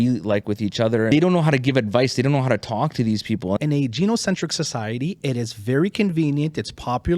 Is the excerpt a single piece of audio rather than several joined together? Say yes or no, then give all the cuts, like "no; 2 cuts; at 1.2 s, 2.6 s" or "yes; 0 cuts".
no; 2 cuts; at 1.1 s, 3.6 s